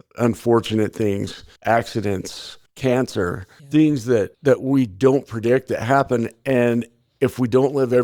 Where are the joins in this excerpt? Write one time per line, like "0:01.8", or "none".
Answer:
none